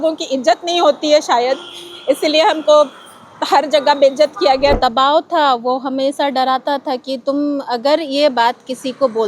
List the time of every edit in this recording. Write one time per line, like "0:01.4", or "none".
0:04.8